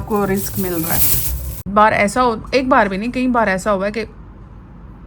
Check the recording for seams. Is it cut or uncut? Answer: cut